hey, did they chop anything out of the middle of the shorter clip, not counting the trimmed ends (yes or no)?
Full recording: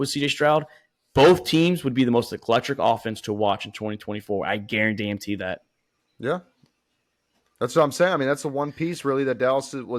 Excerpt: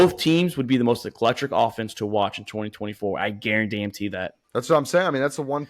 yes